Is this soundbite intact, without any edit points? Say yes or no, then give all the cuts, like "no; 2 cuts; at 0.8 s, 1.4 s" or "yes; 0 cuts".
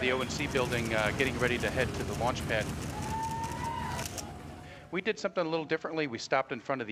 yes; 0 cuts